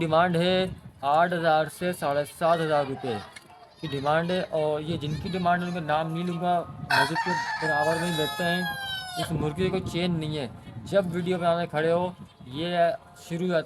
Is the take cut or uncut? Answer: uncut